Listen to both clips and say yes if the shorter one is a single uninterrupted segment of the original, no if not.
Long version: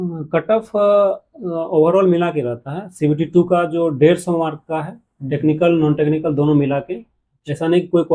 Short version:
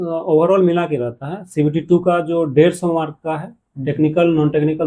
yes